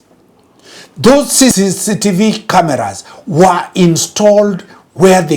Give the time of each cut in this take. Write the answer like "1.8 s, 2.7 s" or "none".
1.5 s